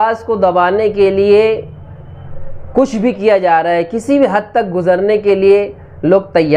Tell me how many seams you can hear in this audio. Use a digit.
0